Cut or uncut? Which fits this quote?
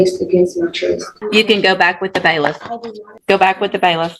cut